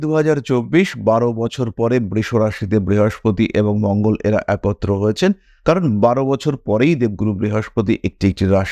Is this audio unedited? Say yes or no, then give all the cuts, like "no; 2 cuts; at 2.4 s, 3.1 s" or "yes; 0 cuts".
yes; 0 cuts